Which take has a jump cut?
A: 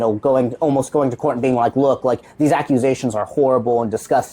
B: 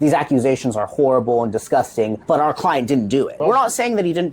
B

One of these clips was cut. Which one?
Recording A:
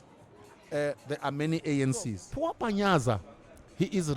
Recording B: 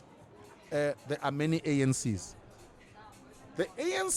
A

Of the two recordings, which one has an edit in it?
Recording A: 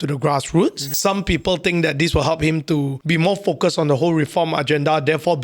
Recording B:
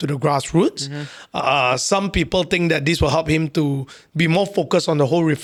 A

